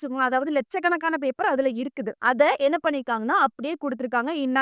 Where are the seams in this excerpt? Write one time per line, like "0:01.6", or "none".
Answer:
0:02.1